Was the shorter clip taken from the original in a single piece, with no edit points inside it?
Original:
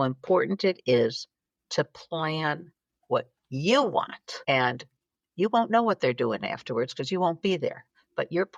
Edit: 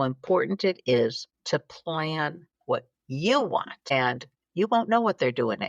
no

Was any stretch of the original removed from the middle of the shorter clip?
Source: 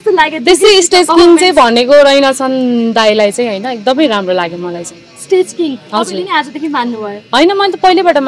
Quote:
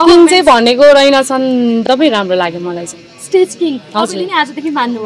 yes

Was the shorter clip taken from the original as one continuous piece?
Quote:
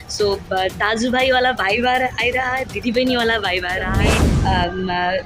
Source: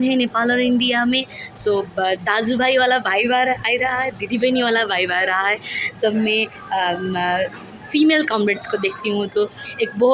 no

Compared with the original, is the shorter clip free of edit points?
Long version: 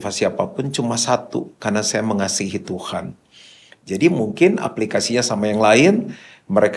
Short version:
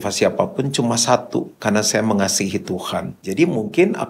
no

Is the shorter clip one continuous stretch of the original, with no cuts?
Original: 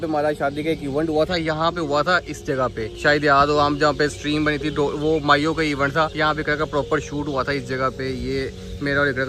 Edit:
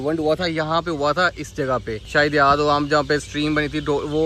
yes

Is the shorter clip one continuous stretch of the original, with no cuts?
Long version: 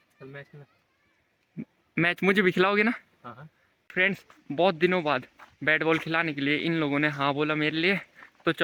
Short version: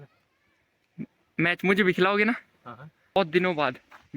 no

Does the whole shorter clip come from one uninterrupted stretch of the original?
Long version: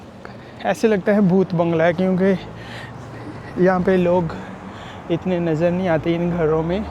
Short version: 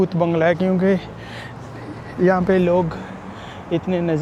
yes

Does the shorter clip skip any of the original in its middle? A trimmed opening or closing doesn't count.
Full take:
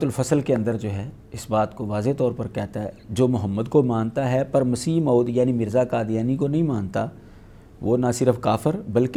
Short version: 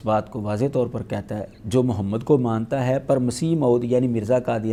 no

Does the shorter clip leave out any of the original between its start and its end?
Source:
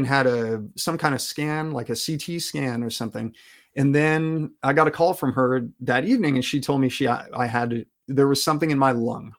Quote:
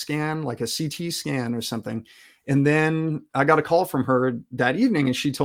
no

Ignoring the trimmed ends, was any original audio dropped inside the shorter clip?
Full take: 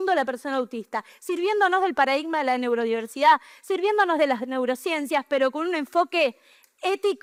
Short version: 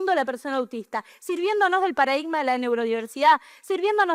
no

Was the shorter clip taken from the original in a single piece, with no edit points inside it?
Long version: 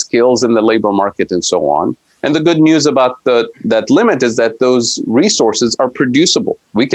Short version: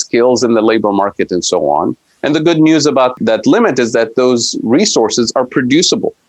no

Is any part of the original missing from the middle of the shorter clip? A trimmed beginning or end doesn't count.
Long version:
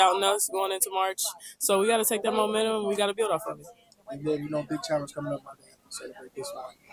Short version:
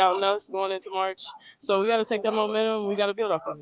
no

